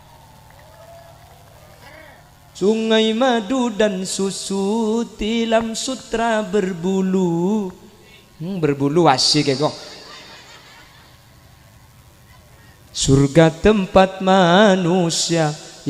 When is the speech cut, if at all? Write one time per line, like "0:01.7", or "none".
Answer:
0:02.4

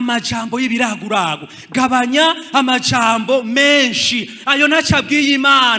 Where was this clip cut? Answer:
none

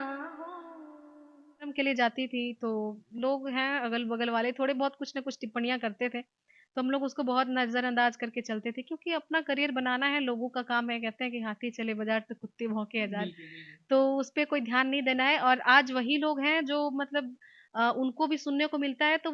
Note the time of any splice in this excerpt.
0:01.7

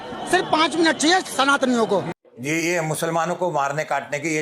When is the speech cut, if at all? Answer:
0:02.2

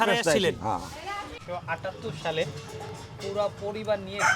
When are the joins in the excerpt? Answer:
0:01.4

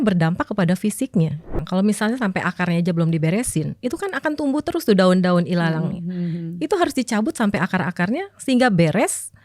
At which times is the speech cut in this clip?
0:01.6

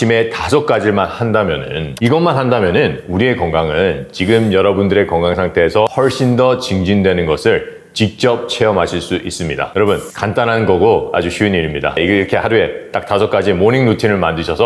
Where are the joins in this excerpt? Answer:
0:01.9
0:05.9

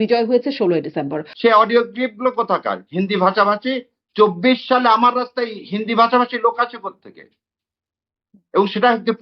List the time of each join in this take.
0:01.2

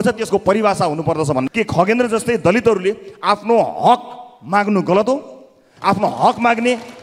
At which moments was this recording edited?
0:01.5

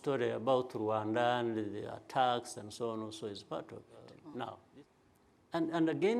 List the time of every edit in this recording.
0:04.6

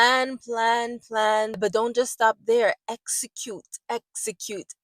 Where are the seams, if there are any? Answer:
0:01.5

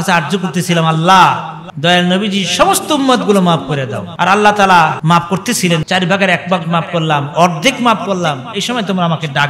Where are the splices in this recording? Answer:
none

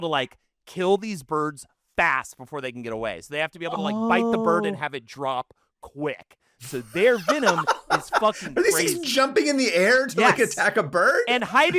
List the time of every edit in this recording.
none

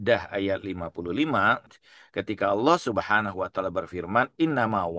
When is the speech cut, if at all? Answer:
0:01.7

